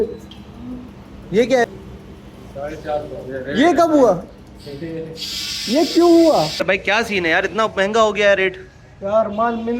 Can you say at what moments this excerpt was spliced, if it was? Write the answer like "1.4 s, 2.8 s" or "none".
1.6 s, 6.3 s